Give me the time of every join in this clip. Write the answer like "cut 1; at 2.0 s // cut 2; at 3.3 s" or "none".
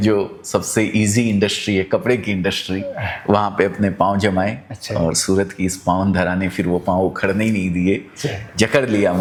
none